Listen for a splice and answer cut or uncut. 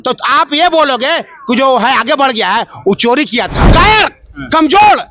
cut